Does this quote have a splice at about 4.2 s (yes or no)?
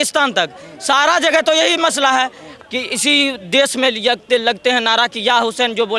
no